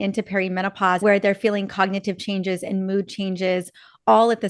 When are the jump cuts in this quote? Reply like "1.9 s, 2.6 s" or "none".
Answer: 1.0 s